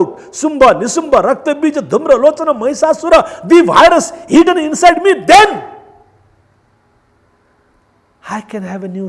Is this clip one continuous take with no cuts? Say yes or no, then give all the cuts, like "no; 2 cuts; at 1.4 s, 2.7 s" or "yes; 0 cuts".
yes; 0 cuts